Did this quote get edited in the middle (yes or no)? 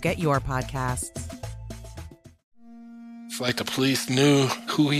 yes